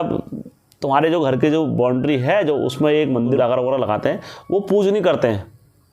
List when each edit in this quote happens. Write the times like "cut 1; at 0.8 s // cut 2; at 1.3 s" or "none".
cut 1; at 3.4 s